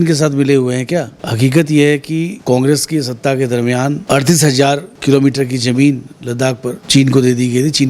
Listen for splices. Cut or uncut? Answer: cut